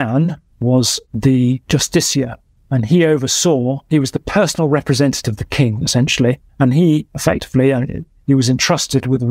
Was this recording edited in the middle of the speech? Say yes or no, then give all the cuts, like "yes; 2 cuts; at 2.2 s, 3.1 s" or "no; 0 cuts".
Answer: no; 0 cuts